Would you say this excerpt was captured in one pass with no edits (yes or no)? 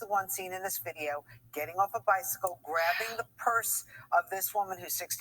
no